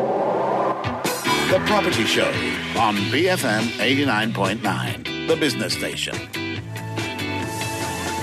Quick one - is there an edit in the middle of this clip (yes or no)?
no